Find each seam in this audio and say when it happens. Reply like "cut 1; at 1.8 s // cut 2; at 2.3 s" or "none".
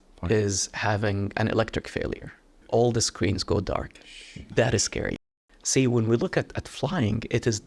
cut 1; at 2.6 s // cut 2; at 5.2 s